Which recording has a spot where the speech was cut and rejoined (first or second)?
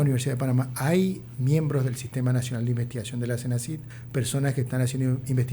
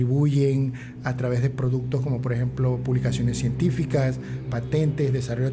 first